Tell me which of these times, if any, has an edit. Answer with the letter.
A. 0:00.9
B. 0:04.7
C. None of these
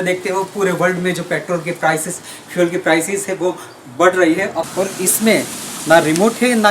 B